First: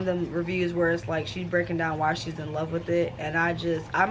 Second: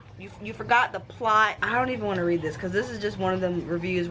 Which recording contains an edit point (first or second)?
second